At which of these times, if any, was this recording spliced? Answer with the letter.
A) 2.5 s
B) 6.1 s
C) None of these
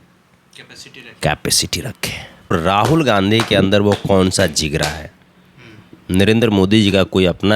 A